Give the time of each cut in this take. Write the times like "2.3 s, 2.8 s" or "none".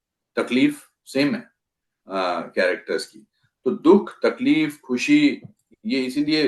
none